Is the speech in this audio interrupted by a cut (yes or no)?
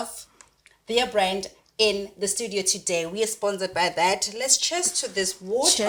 no